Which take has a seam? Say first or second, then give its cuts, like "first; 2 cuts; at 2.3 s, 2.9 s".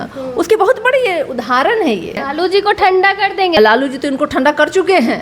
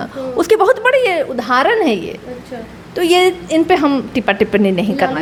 first; 2 cuts; at 2.3 s, 3.6 s